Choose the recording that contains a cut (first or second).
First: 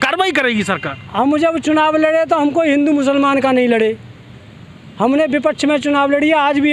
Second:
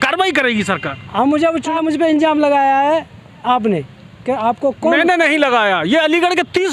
second